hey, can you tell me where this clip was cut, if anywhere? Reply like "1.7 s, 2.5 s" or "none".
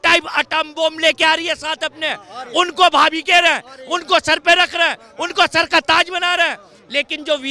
none